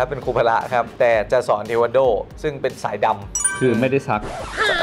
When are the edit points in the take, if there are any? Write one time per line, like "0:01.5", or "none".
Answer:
0:00.9